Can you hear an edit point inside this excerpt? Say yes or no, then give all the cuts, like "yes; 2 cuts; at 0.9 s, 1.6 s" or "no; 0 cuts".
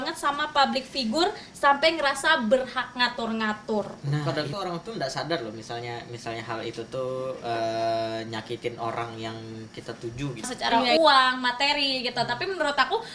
yes; 2 cuts; at 4.2 s, 10.5 s